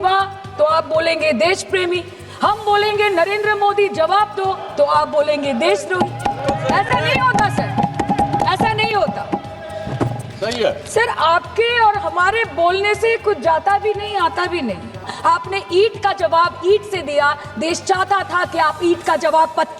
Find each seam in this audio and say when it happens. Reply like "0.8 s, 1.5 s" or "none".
15.1 s